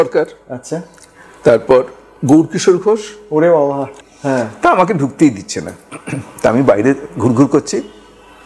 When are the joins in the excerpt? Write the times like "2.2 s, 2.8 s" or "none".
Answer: 4.1 s